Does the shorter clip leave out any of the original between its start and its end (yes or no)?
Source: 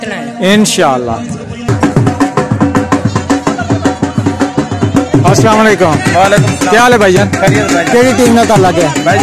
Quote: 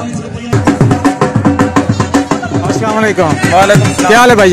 yes